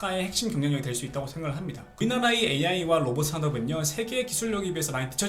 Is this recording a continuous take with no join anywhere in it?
no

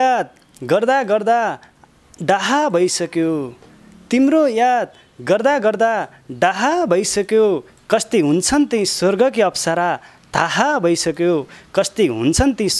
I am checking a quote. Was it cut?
no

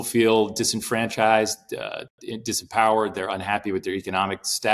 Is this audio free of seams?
yes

